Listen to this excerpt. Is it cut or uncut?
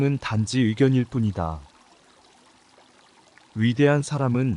cut